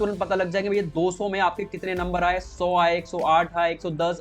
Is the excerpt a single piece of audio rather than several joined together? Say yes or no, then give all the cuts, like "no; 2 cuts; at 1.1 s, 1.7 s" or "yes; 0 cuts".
yes; 0 cuts